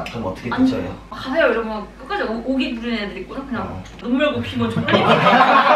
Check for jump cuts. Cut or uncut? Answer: uncut